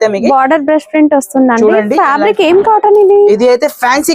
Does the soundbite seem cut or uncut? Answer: uncut